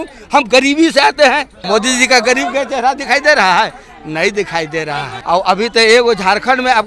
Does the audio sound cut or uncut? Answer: cut